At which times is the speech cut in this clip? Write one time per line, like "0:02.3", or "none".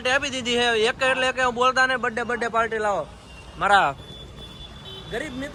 none